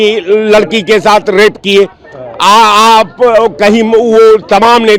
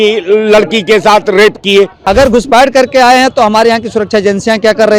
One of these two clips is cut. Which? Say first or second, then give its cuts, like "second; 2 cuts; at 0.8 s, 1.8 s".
second; 1 cut; at 2.0 s